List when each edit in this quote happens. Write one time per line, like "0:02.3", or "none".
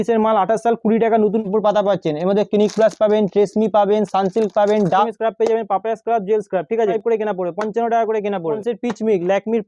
0:01.4
0:05.1
0:07.0
0:08.6